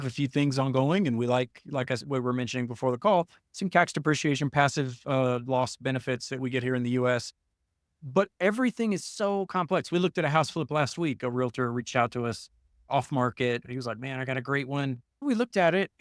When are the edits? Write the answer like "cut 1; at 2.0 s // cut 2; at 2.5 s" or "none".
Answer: cut 1; at 13.7 s